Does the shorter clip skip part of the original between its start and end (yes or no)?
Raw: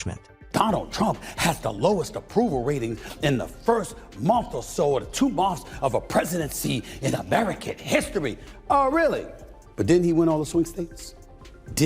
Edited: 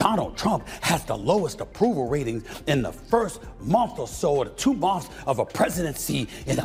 no